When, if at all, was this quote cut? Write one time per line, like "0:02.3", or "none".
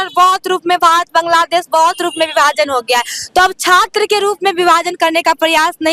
none